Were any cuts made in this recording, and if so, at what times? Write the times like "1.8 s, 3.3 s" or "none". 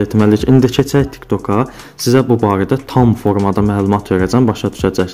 none